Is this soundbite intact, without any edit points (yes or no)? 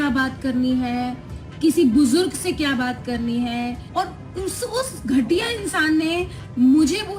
no